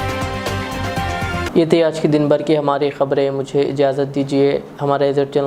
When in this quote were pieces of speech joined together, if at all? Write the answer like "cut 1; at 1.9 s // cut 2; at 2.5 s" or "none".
none